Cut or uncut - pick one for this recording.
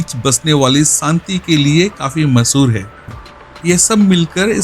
cut